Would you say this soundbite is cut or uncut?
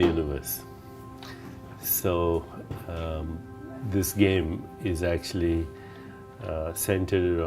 cut